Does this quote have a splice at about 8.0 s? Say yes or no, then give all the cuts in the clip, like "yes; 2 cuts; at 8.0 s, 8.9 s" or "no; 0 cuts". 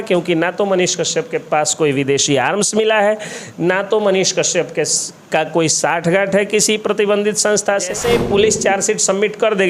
yes; 1 cut; at 8.0 s